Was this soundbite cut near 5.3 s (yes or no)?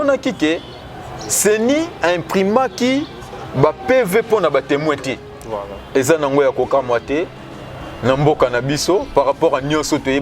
yes